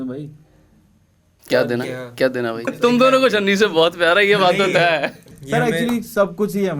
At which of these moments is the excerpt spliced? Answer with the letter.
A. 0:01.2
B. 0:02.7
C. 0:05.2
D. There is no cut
B